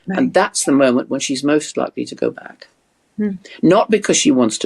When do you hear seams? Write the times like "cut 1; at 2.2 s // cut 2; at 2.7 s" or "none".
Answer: none